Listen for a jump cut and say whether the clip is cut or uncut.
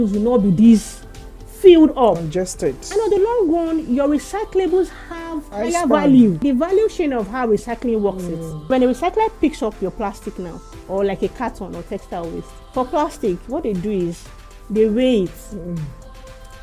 cut